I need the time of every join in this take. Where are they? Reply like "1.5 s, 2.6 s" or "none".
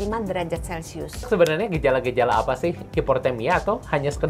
1.3 s, 2.8 s